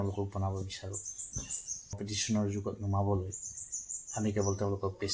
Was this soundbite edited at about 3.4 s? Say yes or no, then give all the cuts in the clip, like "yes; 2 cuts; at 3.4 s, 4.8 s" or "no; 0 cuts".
no; 1 cut; at 2.0 s